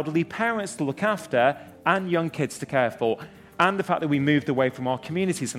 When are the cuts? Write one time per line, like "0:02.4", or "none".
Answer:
none